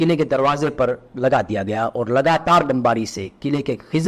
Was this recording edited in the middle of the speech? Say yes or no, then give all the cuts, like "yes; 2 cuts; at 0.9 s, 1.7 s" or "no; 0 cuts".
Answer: no; 0 cuts